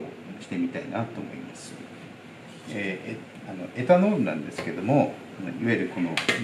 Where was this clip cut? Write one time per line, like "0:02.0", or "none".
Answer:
none